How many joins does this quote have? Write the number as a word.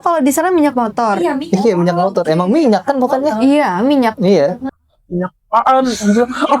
one